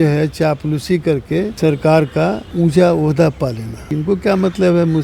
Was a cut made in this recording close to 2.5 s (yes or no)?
yes